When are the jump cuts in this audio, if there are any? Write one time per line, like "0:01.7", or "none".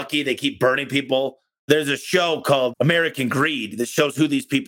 0:01.6